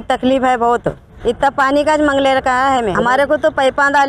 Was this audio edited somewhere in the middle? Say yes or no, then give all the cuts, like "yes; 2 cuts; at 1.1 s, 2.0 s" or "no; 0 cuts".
yes; 2 cuts; at 1.1 s, 2.9 s